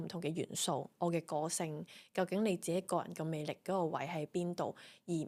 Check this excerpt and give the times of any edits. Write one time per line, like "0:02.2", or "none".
none